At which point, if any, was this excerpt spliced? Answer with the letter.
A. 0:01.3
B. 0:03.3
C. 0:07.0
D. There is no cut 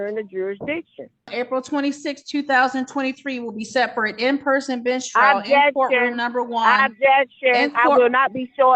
A